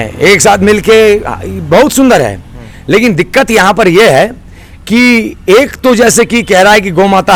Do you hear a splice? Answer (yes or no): no